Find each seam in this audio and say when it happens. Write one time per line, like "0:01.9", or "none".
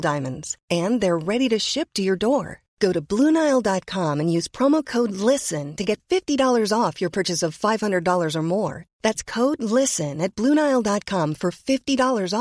none